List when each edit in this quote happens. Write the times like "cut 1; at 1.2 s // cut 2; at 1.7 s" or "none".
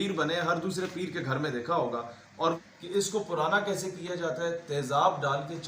cut 1; at 2.8 s